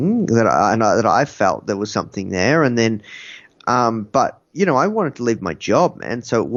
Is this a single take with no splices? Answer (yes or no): yes